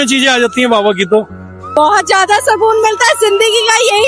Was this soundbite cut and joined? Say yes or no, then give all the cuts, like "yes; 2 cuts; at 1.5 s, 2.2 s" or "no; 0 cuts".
yes; 1 cut; at 1.6 s